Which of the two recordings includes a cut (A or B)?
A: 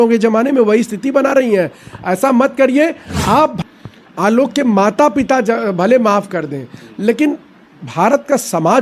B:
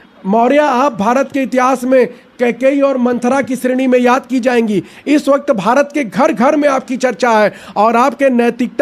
A